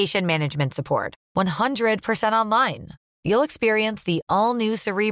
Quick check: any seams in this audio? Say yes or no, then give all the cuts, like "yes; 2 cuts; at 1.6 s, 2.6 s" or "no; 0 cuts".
no; 0 cuts